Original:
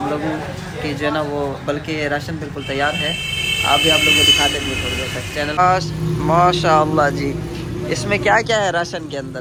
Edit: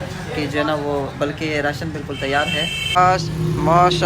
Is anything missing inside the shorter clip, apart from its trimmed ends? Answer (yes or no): yes